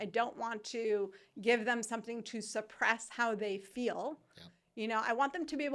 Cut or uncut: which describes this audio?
uncut